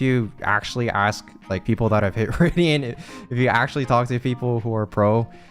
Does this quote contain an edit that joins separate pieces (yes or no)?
yes